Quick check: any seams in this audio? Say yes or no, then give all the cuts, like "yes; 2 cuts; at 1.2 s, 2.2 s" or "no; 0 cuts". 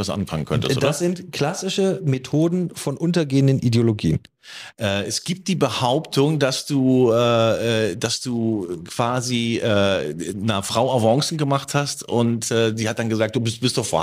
yes; 1 cut; at 4.4 s